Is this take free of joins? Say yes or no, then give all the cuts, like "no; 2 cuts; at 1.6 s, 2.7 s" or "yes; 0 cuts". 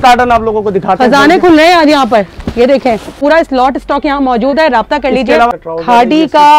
no; 2 cuts; at 3.1 s, 5.6 s